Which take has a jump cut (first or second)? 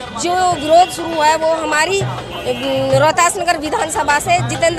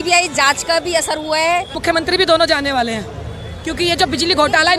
second